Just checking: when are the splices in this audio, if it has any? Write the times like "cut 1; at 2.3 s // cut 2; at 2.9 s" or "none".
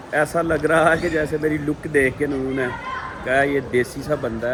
none